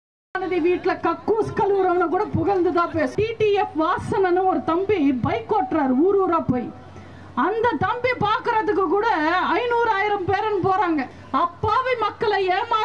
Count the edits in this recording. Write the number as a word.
two